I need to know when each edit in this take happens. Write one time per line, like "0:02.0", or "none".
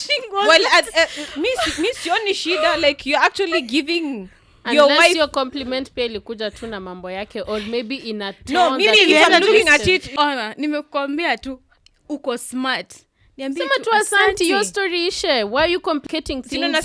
0:10.1
0:16.0